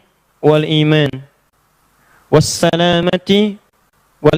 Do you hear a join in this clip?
no; 0 cuts

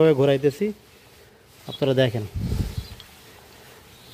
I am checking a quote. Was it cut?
no; 0 cuts

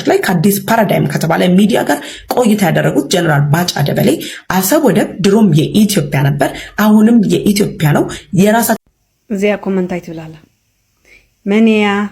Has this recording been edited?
yes; 1 cut; at 8.8 s

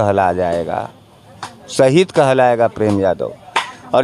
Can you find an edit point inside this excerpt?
no; 0 cuts

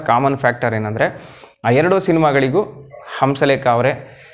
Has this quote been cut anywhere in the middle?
no; 0 cuts

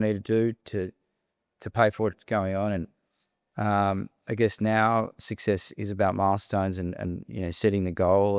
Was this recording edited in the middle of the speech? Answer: no; 0 cuts

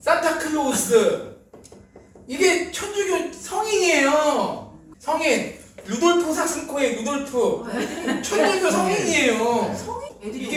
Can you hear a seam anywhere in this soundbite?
no; 0 cuts

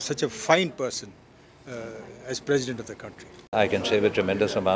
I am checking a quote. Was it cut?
yes; 1 cut; at 3.5 s

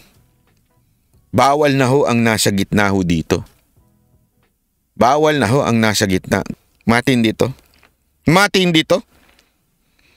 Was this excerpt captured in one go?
no; 1 cut; at 6.5 s

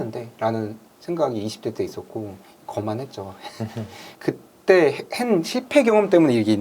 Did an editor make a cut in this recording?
yes; 1 cut; at 4.0 s

